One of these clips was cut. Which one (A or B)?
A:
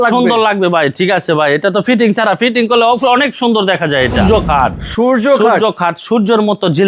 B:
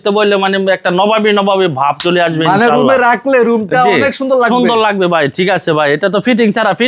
A